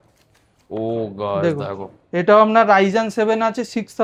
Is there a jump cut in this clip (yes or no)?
no